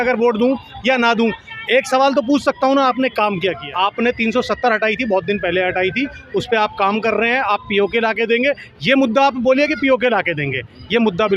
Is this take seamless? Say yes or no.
no